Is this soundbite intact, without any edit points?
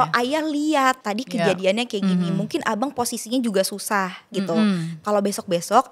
no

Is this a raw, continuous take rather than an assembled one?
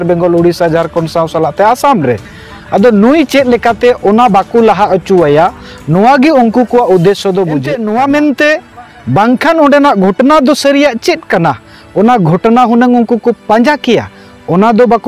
no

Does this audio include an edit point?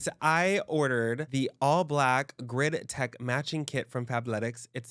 no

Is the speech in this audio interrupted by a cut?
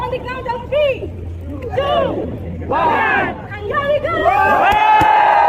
no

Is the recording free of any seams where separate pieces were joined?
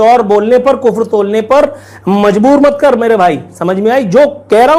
yes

